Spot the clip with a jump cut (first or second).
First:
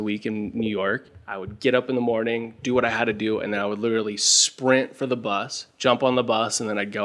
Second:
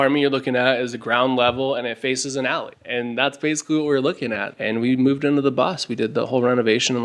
second